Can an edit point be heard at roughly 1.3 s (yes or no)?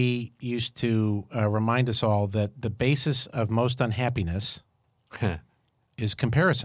no